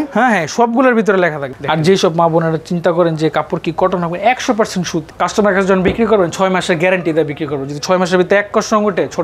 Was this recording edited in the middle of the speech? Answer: yes; 2 cuts; at 1.4 s, 5.0 s

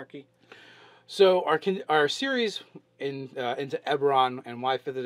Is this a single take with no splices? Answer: no; 1 cut; at 3.8 s

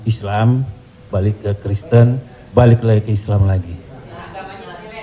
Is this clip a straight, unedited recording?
yes; 0 cuts

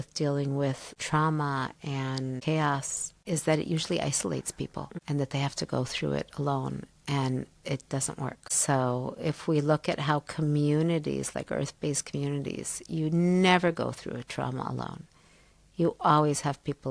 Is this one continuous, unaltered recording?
yes; 0 cuts

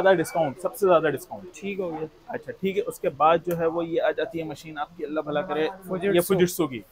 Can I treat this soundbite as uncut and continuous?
yes; 0 cuts

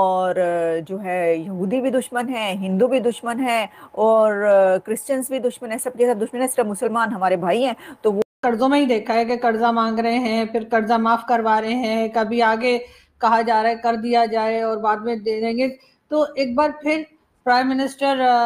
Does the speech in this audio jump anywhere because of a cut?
yes; 1 cut; at 8.2 s

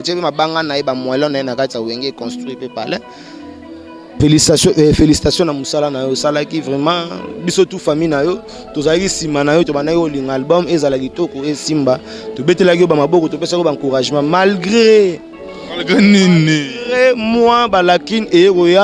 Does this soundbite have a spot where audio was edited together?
no; 0 cuts

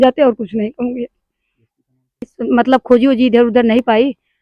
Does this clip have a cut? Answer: yes; 1 cut; at 2.3 s

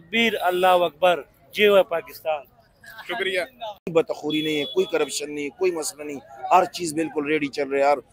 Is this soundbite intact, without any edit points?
no; 1 cut; at 3.8 s

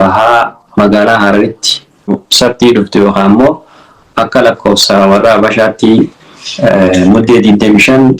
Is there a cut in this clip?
yes; 1 cut; at 2.2 s

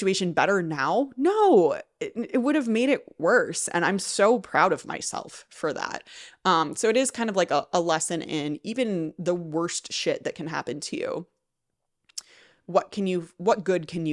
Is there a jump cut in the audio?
no; 0 cuts

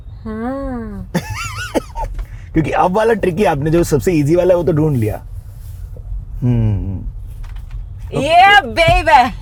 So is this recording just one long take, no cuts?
yes; 0 cuts

